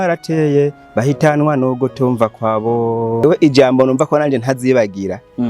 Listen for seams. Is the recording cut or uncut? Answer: cut